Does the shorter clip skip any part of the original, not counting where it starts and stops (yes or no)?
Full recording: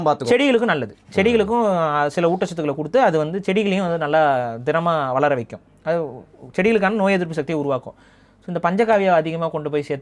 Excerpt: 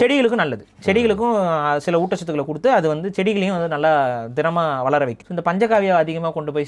yes